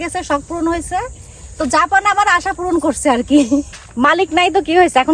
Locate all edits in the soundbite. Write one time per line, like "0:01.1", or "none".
0:03.7